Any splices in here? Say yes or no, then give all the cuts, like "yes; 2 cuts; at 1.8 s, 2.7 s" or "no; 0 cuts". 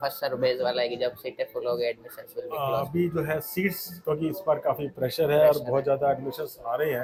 no; 0 cuts